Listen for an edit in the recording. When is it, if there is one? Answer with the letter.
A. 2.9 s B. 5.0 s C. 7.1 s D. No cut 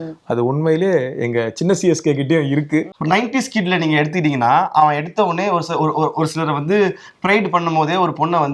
A